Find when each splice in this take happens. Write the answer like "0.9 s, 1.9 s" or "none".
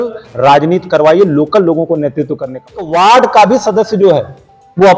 2.8 s